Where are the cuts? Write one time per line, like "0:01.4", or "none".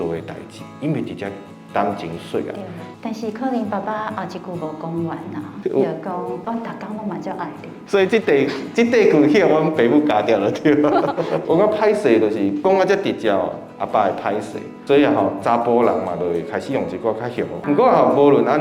0:02.8
0:17.6